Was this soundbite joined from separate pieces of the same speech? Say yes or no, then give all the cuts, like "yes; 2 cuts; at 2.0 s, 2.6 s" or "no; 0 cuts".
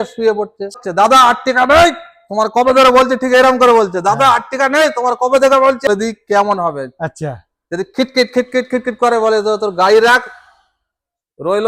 yes; 2 cuts; at 0.8 s, 5.9 s